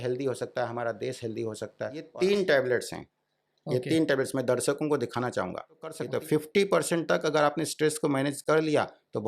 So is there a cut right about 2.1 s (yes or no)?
yes